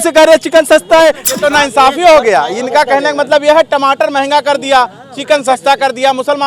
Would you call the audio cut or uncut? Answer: cut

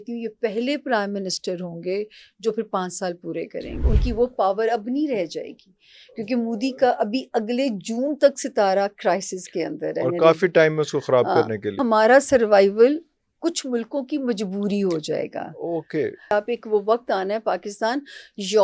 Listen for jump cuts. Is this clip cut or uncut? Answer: cut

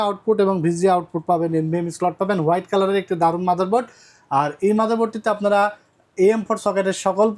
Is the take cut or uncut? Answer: uncut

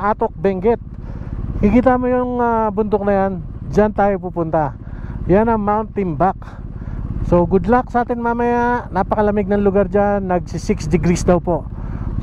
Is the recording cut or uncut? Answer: uncut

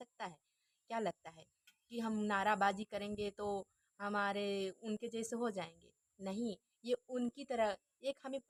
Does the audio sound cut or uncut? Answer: uncut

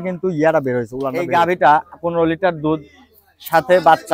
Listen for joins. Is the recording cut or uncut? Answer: cut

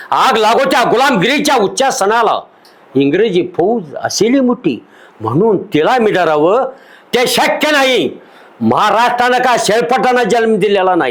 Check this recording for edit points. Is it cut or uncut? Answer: uncut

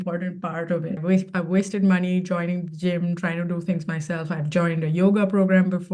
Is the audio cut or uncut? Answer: cut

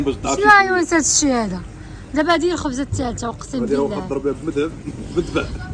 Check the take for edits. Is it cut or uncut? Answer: uncut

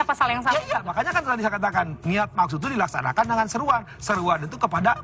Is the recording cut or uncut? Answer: uncut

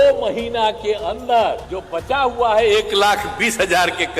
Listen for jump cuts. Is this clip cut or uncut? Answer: cut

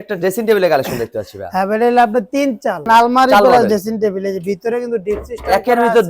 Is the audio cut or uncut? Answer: cut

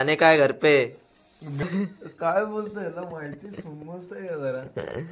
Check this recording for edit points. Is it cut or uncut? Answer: cut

